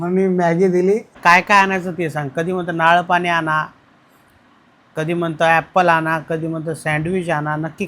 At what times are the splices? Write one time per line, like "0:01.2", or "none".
0:01.2